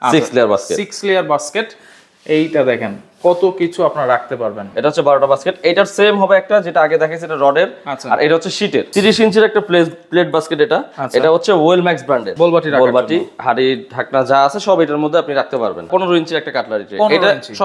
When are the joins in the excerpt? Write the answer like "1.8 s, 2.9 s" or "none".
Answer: 4.6 s, 8.9 s, 12.3 s, 15.9 s